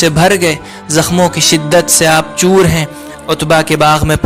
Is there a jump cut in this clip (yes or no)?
no